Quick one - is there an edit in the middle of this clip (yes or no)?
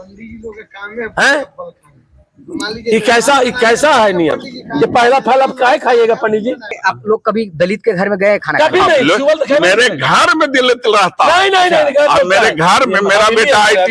yes